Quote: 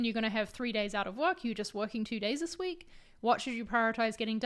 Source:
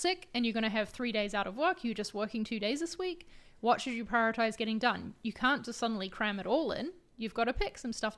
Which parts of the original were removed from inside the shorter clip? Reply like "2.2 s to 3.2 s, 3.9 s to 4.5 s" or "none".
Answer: none